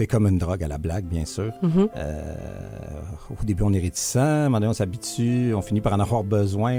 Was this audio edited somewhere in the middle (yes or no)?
no